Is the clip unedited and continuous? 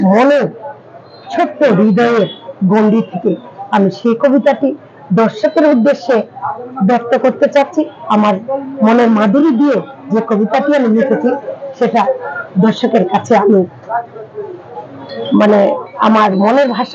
yes; 0 cuts

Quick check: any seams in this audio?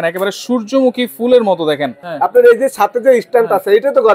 yes; 1 cut; at 2.0 s

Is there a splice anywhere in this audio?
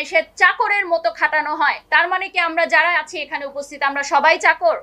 yes; 1 cut; at 1.8 s

